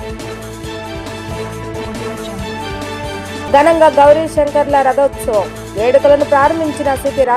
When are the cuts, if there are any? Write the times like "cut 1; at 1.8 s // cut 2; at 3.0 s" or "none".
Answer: cut 1; at 1.3 s // cut 2; at 3.5 s